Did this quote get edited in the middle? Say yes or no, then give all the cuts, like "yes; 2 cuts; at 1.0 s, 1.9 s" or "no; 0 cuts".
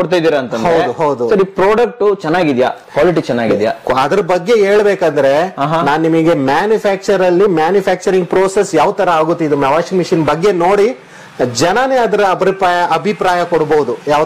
no; 0 cuts